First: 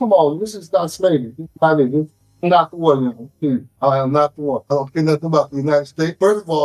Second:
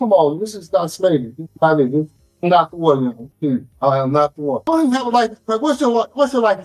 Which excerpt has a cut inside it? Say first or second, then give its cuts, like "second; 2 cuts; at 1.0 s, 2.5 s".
second; 1 cut; at 4.6 s